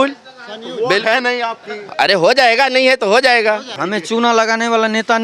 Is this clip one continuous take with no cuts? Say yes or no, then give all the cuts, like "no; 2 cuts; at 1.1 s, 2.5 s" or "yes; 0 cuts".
no; 1 cut; at 3.7 s